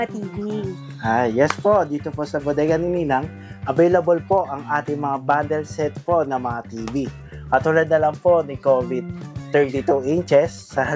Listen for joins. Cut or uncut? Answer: uncut